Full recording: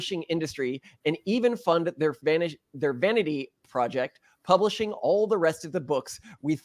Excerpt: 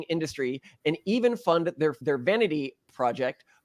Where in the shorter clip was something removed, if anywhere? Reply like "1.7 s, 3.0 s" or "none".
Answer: 2.0 s